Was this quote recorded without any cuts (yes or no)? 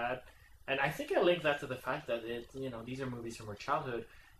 yes